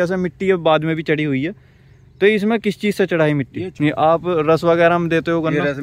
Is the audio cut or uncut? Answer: cut